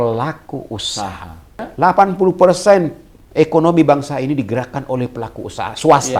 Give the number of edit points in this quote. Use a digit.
1